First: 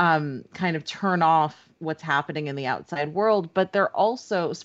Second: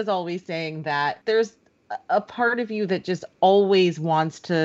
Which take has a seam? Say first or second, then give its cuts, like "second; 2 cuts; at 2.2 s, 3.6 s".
second; 1 cut; at 1.2 s